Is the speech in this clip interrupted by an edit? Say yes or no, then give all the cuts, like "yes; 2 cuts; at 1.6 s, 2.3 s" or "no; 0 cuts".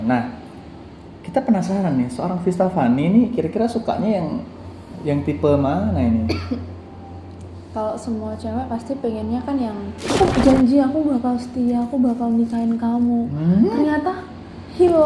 yes; 1 cut; at 10.1 s